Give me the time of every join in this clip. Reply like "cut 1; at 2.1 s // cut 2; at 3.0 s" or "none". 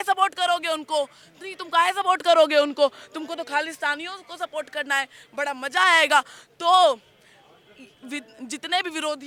none